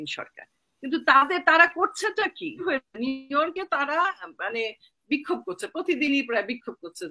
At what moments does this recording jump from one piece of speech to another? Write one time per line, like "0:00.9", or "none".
0:02.6